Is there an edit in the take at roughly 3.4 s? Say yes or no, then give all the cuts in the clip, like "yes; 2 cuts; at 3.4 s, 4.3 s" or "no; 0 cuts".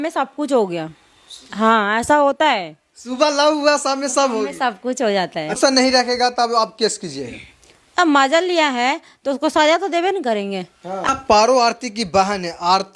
no; 2 cuts; at 5.6 s, 11.0 s